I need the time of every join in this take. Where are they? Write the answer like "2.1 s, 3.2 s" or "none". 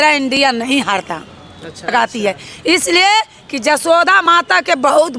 1.9 s